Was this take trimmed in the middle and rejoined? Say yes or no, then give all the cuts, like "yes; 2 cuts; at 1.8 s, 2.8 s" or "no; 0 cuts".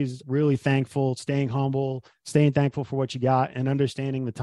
yes; 1 cut; at 3.5 s